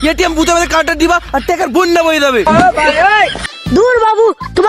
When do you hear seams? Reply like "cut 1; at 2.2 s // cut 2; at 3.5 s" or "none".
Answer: cut 1; at 3.5 s